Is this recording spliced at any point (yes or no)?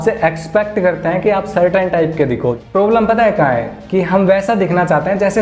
yes